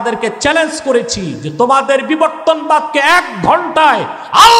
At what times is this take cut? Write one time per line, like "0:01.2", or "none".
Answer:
none